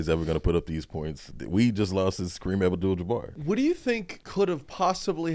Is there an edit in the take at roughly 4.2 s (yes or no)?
yes